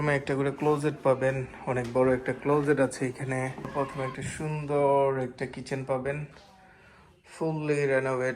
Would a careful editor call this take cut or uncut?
cut